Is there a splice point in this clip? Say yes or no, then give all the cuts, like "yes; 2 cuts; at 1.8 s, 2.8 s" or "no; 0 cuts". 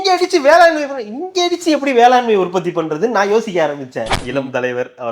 yes; 1 cut; at 4.2 s